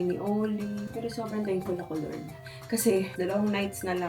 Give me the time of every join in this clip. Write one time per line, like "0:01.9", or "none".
0:03.1